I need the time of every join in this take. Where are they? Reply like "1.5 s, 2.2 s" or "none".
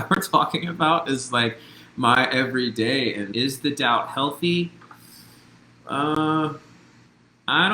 3.3 s